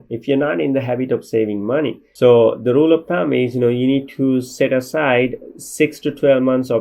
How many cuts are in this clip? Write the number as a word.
one